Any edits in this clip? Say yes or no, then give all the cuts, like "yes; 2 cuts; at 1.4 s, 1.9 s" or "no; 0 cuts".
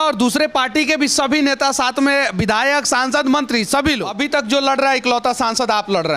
yes; 1 cut; at 4.1 s